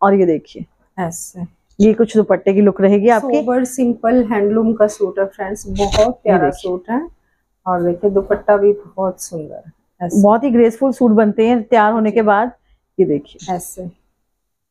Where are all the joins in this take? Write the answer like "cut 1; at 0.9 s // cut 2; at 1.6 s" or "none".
none